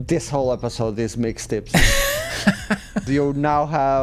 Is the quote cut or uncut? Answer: cut